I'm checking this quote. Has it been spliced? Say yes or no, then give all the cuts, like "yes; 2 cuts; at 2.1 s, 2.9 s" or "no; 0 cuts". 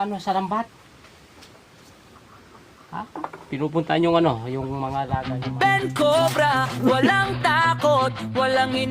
yes; 1 cut; at 5.2 s